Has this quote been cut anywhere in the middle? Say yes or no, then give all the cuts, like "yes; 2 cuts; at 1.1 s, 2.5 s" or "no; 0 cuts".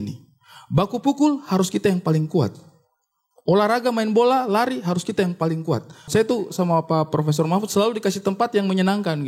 yes; 1 cut; at 6.1 s